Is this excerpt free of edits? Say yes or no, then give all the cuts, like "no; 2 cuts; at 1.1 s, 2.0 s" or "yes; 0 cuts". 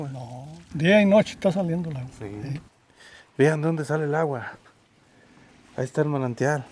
no; 1 cut; at 2.7 s